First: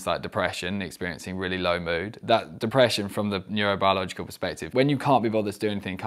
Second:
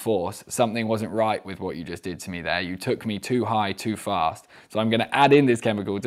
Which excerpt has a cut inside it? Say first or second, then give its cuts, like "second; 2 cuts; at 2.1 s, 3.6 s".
first; 1 cut; at 4.6 s